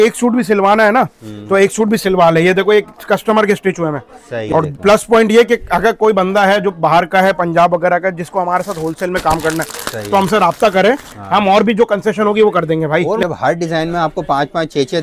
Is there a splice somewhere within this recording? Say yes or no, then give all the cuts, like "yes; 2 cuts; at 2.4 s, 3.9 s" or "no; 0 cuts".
yes; 2 cuts; at 4.5 s, 13.2 s